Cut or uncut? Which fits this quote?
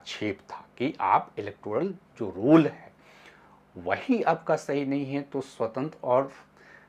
uncut